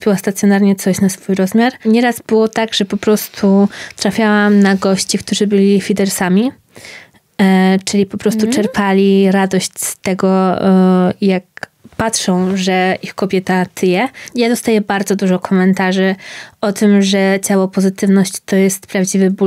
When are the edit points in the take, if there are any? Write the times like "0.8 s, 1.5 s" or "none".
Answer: 1.8 s, 14.3 s